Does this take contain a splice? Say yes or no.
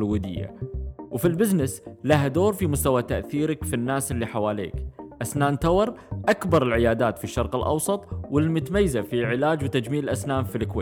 no